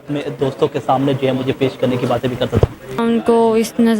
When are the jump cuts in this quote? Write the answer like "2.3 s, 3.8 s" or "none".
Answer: 3.0 s